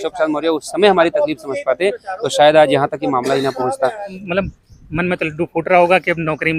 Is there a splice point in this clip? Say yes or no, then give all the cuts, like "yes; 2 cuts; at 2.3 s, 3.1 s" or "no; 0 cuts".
yes; 1 cut; at 4.1 s